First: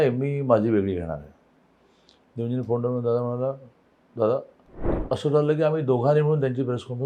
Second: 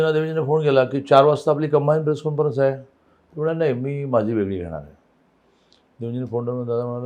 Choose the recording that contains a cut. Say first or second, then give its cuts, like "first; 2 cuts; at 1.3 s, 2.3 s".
first; 1 cut; at 5.0 s